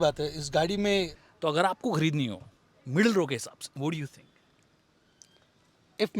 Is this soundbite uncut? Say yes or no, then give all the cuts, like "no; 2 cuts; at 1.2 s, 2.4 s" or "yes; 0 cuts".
no; 1 cut; at 1.2 s